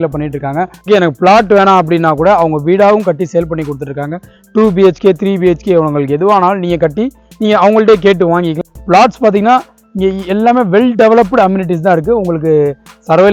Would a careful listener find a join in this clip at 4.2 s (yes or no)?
no